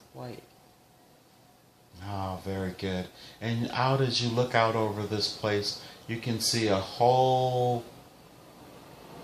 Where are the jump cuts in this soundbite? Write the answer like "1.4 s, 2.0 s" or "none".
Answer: 4.8 s